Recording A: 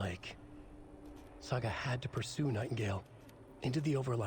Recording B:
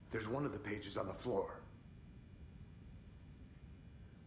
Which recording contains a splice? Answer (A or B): B